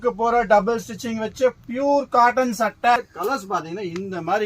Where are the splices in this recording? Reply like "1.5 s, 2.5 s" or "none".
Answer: 3.0 s